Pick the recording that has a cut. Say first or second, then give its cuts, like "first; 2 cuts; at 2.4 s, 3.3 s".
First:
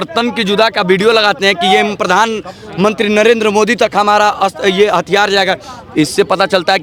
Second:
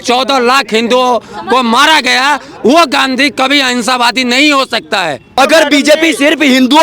second; 1 cut; at 5.3 s